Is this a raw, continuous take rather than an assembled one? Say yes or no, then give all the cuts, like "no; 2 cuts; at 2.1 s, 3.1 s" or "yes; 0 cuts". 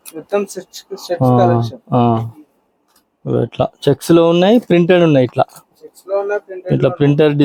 yes; 0 cuts